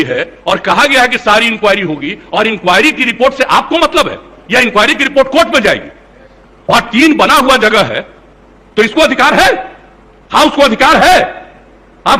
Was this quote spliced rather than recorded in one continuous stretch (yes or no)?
no